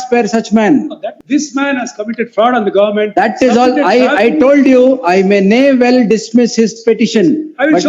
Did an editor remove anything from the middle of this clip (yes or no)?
yes